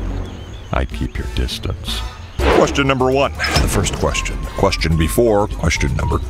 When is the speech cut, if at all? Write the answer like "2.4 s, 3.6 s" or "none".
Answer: 2.3 s